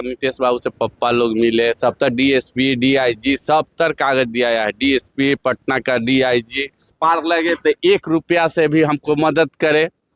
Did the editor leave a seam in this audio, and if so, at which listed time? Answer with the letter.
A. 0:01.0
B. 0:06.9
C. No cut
B